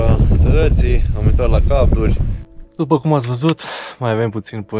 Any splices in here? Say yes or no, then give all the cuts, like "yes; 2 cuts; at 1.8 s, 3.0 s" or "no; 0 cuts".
yes; 1 cut; at 2.4 s